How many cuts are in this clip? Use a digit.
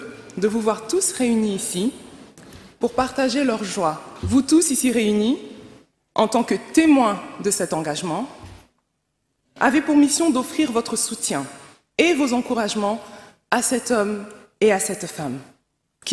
1